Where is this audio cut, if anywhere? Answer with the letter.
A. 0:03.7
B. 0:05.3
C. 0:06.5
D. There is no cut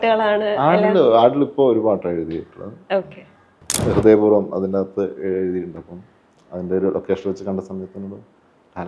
A